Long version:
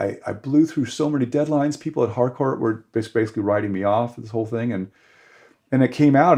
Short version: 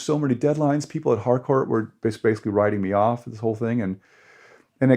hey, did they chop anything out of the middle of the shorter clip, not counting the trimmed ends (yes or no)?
no